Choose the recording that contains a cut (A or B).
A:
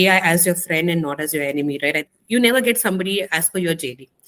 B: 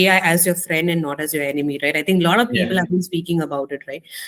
A